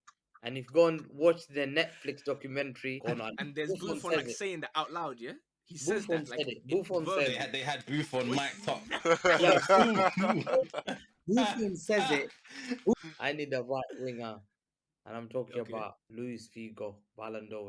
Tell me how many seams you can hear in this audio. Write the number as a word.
three